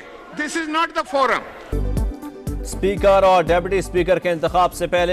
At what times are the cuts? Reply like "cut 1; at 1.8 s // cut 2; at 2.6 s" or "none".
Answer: cut 1; at 1.7 s

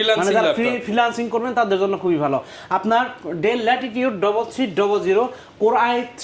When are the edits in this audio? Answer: none

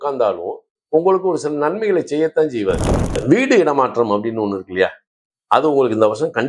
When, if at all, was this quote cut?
cut 1; at 3.2 s

